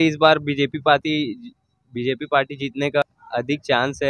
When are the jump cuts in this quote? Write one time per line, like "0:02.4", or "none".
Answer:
0:03.2